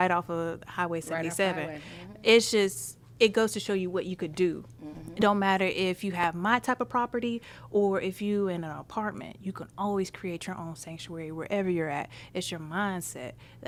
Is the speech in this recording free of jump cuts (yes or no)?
yes